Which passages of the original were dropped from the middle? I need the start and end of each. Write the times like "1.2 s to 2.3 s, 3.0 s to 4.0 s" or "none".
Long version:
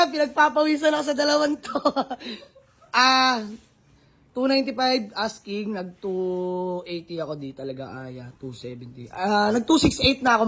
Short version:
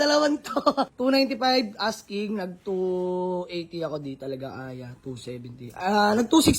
2.1 s to 4.3 s